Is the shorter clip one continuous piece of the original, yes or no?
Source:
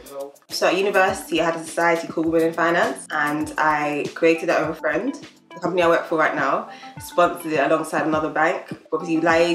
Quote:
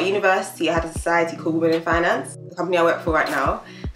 no